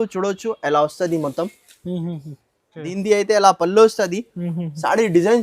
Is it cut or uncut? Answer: cut